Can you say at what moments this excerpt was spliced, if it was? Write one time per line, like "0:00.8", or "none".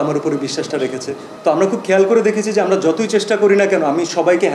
0:01.3